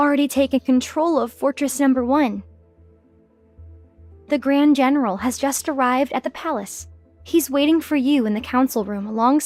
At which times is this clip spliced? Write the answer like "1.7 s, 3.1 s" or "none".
none